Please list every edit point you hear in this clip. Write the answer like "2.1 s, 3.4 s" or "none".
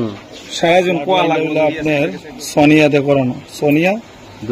1.4 s